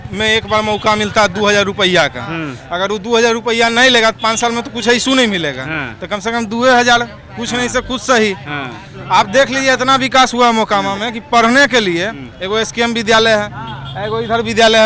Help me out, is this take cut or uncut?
uncut